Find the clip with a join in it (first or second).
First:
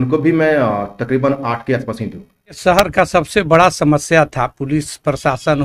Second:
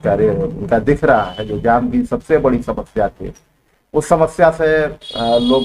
first